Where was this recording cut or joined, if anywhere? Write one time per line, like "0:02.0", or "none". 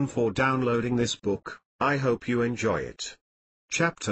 0:01.1